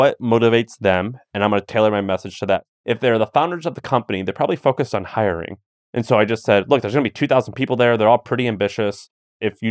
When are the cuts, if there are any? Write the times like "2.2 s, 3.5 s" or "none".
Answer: 2.7 s